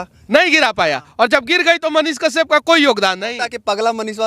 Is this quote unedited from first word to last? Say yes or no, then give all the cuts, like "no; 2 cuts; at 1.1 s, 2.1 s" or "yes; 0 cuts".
yes; 0 cuts